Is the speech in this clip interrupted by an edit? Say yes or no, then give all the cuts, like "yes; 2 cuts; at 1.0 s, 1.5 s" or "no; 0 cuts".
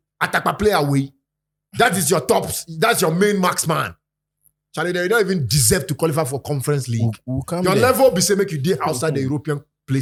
no; 0 cuts